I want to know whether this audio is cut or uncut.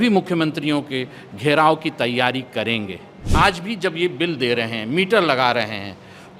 cut